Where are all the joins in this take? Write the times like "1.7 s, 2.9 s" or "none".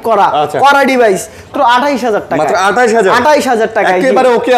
1.5 s